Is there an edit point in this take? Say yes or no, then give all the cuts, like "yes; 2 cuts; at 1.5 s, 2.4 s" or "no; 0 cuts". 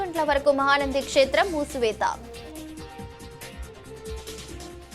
yes; 1 cut; at 2.2 s